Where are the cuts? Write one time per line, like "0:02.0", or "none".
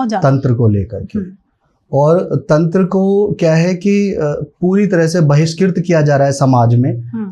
none